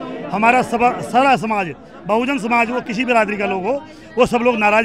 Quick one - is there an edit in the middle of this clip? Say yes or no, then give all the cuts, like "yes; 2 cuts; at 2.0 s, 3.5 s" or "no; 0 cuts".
no; 0 cuts